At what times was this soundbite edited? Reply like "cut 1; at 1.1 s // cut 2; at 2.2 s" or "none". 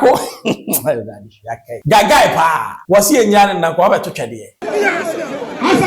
cut 1; at 1.7 s // cut 2; at 2.7 s // cut 3; at 4.6 s